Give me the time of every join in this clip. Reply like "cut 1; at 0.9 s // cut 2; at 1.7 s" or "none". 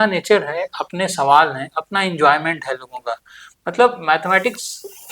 none